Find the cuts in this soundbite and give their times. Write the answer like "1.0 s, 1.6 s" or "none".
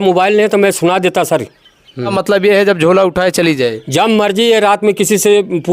2.1 s